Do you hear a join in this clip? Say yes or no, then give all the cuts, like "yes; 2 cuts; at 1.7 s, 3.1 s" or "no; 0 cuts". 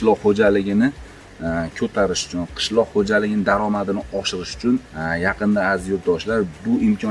yes; 1 cut; at 4.9 s